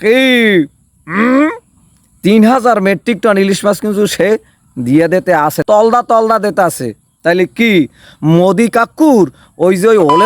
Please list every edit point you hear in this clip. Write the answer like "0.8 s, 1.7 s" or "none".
5.6 s